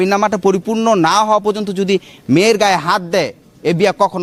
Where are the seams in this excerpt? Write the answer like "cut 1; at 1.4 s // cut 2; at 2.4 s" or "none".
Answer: none